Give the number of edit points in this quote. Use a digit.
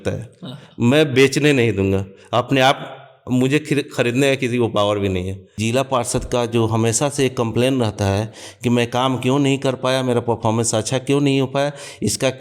1